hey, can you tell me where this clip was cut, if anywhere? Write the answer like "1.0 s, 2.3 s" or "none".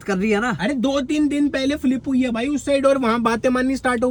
none